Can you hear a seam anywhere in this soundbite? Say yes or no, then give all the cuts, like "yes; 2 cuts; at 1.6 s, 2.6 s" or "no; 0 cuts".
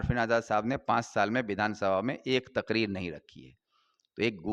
no; 0 cuts